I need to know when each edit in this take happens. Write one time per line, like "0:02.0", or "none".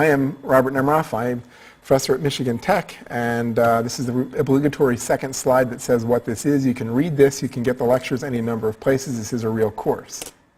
none